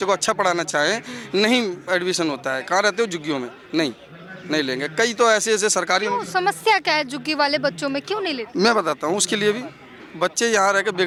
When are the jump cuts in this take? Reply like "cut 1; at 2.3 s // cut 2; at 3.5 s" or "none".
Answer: none